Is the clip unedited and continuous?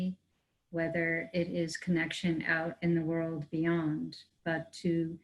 yes; 0 cuts

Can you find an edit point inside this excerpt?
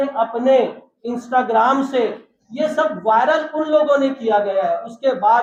no; 0 cuts

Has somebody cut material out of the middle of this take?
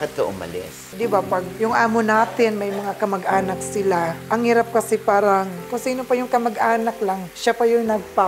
yes; 2 cuts; at 0.9 s, 5.6 s

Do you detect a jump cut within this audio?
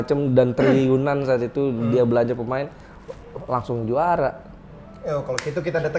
no; 0 cuts

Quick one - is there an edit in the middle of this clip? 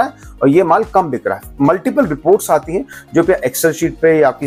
no; 0 cuts

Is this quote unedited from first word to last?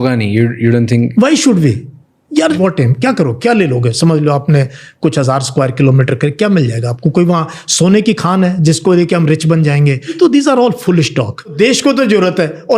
no; 3 cuts; at 2.6 s, 10.1 s, 11.5 s

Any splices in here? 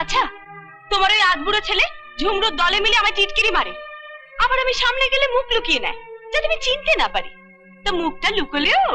no; 0 cuts

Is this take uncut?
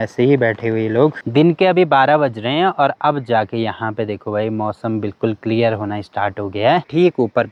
yes; 0 cuts

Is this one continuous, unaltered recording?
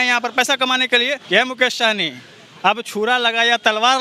no; 1 cut; at 1.2 s

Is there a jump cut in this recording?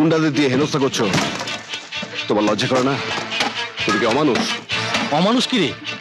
no; 0 cuts

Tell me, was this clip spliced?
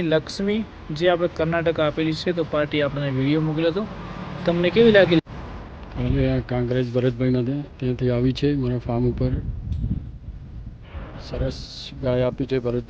yes; 1 cut; at 5.2 s

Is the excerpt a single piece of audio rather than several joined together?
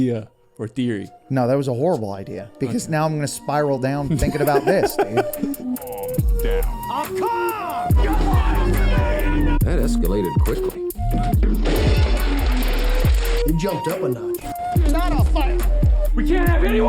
no; 1 cut; at 5.4 s

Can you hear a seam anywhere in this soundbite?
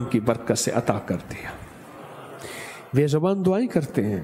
no; 0 cuts

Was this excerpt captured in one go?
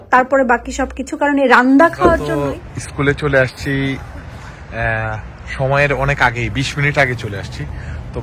no; 1 cut; at 2.3 s

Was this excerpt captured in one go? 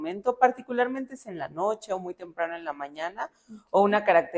yes; 0 cuts

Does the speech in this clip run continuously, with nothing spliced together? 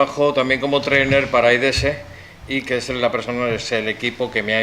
no; 1 cut; at 2.1 s

